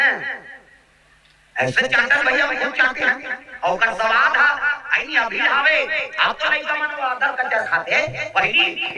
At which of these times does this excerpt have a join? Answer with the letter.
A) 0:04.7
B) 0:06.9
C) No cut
C